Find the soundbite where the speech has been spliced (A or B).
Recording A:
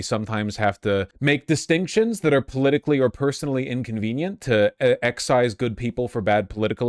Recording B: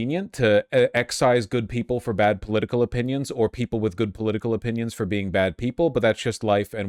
A